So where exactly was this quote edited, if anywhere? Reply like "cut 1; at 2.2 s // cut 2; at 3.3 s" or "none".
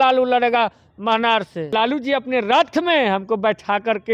cut 1; at 1.7 s